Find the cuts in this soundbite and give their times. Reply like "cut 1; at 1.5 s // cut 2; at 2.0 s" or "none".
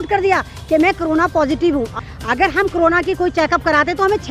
cut 1; at 2.0 s